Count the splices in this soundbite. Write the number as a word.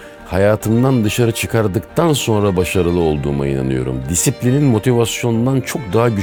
zero